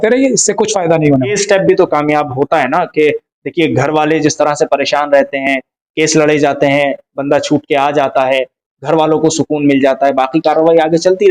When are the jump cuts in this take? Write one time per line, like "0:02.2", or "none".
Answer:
0:01.4